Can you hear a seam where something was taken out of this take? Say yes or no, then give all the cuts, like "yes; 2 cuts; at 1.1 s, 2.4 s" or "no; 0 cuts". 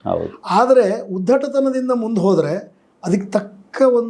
no; 0 cuts